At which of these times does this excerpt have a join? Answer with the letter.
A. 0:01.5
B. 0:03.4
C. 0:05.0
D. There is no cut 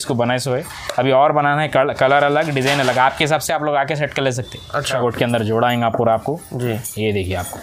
C